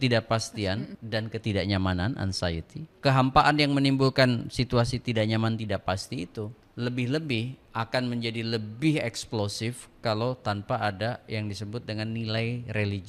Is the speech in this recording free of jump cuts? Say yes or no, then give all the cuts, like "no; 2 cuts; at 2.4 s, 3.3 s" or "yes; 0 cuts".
no; 3 cuts; at 1.0 s, 2.9 s, 6.6 s